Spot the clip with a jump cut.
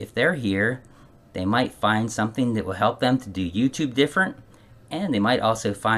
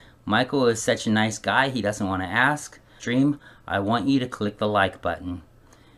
second; 1 cut; at 3.0 s

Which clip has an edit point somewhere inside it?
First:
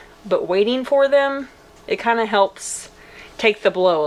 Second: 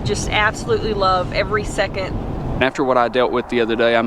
second; 1 cut; at 2.6 s

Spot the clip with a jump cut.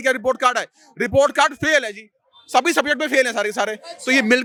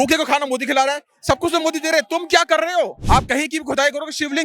second; 1 cut; at 3.0 s

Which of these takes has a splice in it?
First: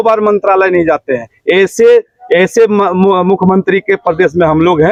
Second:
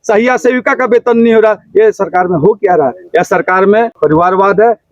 second; 1 cut; at 3.9 s

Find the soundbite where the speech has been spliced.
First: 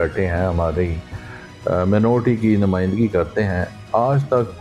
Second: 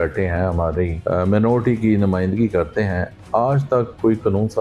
second; 1 cut; at 1.0 s

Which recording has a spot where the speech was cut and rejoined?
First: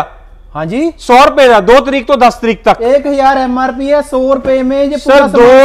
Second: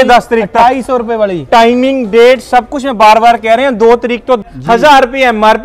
second; 1 cut; at 4.4 s

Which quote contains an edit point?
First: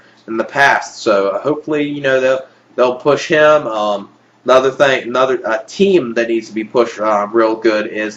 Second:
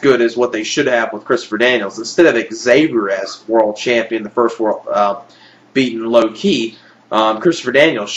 first; 1 cut; at 2.0 s

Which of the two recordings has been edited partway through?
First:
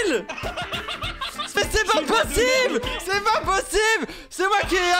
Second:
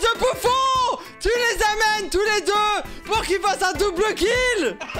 first; 1 cut; at 1.6 s

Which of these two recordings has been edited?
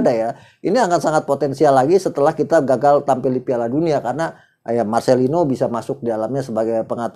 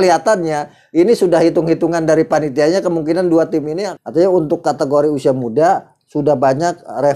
second; 1 cut; at 3.9 s

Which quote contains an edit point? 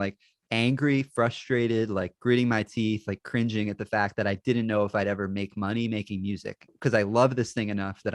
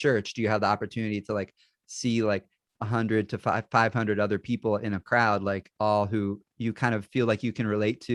first; 1 cut; at 6.7 s

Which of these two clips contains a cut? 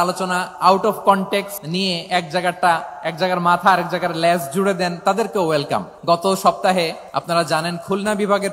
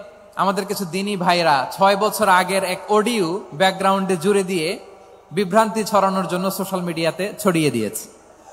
first; 3 cuts; at 1.6 s, 5.9 s, 7.1 s

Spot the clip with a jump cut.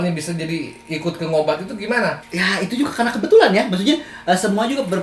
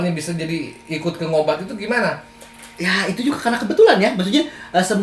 first; 1 cut; at 2.2 s

